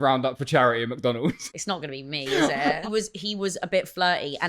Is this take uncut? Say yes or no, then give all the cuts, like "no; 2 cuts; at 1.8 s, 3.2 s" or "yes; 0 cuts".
no; 2 cuts; at 1.4 s, 2.8 s